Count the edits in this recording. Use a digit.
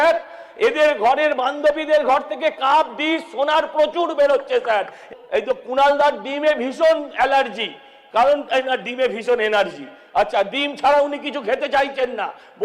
1